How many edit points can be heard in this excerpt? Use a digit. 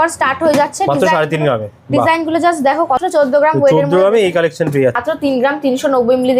2